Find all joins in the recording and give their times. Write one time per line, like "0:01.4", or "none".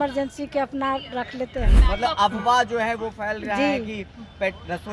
0:01.8